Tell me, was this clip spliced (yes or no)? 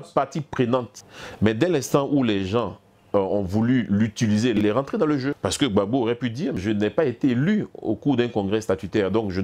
yes